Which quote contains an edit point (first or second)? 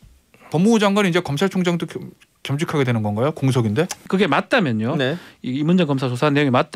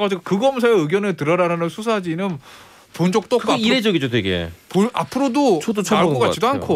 first